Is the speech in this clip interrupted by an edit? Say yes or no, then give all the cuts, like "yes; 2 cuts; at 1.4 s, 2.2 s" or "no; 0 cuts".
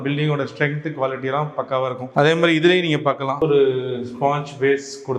yes; 2 cuts; at 2.0 s, 3.4 s